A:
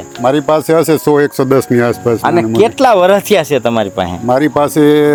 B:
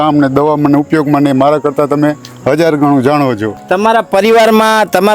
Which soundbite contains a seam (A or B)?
B